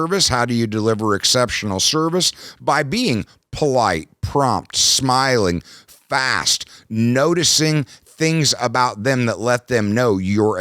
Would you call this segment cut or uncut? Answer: uncut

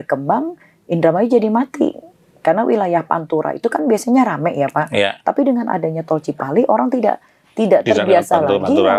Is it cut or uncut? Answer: uncut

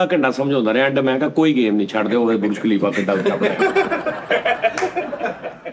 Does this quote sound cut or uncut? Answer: uncut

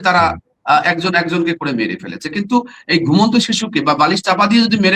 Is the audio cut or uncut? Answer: uncut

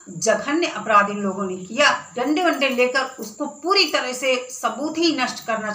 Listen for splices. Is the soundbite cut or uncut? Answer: cut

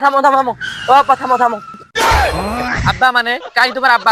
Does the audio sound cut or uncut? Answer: uncut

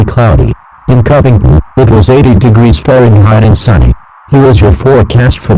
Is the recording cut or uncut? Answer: cut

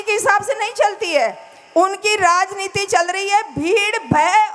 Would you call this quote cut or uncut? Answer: uncut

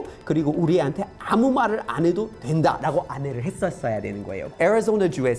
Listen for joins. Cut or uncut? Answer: cut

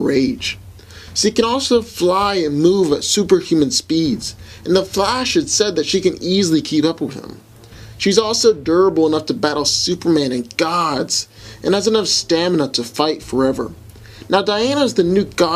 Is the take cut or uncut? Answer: cut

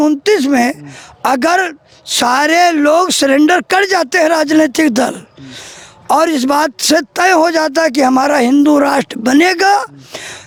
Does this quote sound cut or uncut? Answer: uncut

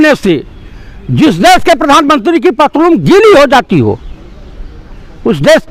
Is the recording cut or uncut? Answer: uncut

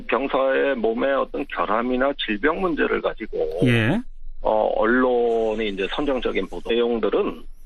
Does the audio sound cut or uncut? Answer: uncut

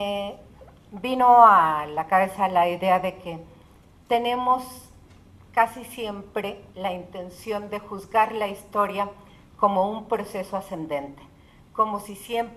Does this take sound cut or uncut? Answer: uncut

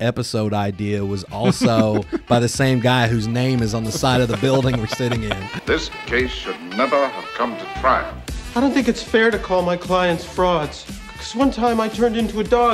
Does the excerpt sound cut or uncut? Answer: cut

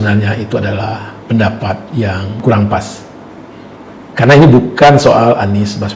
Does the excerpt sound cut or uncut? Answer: cut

